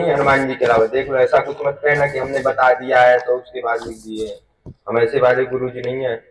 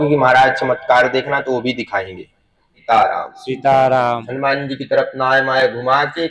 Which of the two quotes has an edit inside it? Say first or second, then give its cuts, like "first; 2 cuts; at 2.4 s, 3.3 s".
second; 1 cut; at 2.7 s